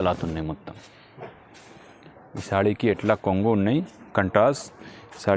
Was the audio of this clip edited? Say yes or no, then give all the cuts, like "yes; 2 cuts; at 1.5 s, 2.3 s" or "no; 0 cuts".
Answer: no; 0 cuts